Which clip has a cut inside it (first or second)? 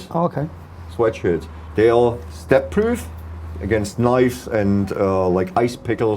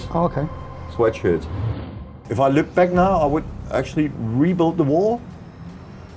second